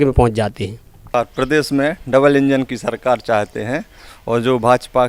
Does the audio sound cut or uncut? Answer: cut